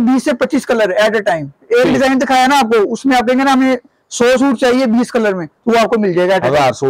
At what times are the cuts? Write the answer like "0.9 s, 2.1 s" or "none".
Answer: none